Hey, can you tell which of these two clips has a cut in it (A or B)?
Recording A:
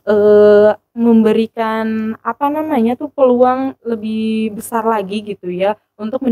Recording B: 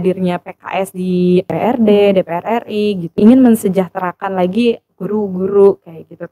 B